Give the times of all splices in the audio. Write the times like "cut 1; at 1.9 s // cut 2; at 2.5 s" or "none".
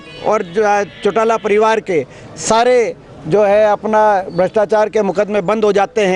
none